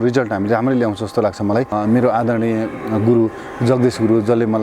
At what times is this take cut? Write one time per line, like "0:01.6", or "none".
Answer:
0:01.7

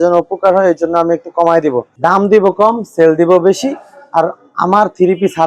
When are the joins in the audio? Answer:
0:01.9

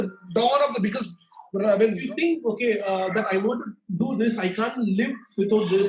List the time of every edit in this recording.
0:02.0

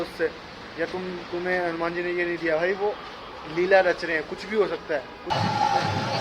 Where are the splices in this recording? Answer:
0:05.3

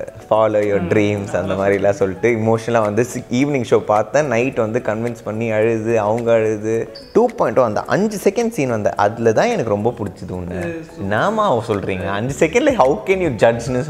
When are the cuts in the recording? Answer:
0:07.0

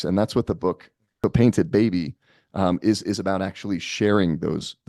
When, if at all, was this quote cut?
0:01.2

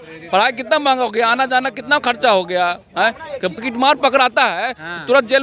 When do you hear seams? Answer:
0:03.7

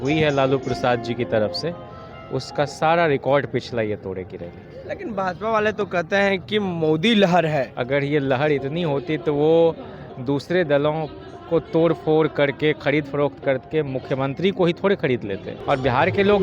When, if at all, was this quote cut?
0:07.7
0:15.5

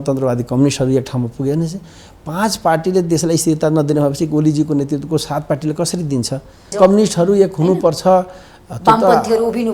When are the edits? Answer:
0:06.7

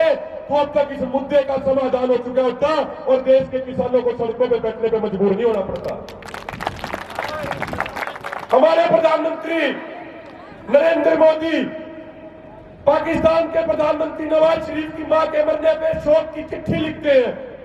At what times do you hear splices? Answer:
none

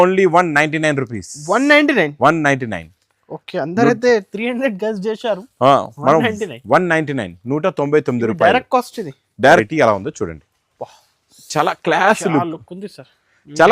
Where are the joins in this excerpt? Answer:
0:09.7

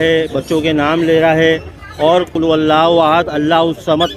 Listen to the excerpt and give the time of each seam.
0:02.3

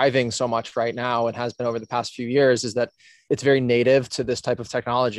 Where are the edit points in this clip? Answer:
0:03.2

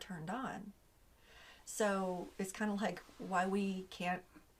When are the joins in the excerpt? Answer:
none

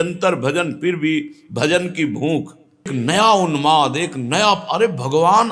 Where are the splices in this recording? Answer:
0:02.9

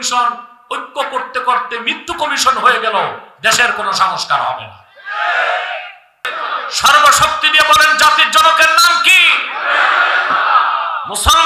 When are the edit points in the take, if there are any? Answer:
0:06.2

